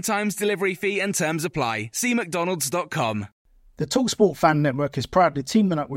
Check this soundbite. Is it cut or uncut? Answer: cut